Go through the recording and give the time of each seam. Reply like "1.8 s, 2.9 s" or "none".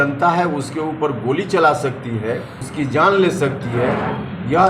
2.6 s